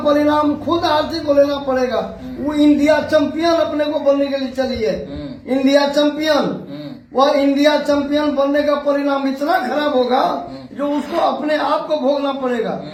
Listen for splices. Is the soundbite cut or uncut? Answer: uncut